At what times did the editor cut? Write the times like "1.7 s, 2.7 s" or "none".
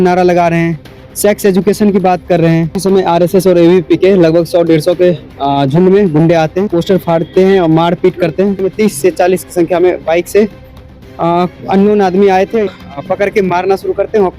2.8 s, 6.7 s, 8.6 s, 12.7 s